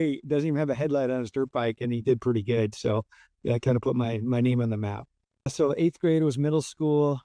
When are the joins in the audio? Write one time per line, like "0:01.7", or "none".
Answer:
0:05.5